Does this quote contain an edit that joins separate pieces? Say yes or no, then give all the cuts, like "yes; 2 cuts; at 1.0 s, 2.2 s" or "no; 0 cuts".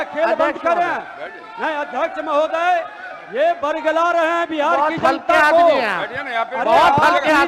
no; 0 cuts